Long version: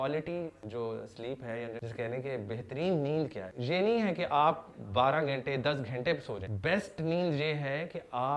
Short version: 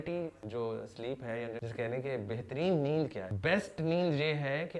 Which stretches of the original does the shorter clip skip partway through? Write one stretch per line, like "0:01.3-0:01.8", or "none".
0:03.5-0:06.5